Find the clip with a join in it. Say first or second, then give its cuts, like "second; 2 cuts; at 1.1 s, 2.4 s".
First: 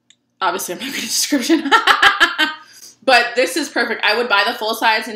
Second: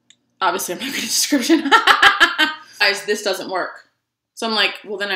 second; 1 cut; at 2.8 s